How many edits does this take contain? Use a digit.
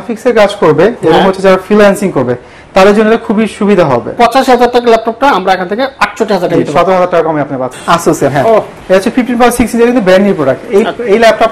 3